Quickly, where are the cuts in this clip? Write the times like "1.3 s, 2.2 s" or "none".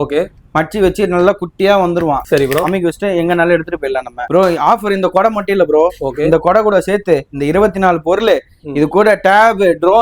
2.2 s, 4.2 s